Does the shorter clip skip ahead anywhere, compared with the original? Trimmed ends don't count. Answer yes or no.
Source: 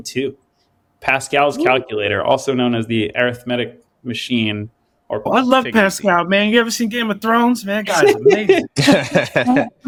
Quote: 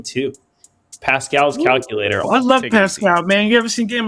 yes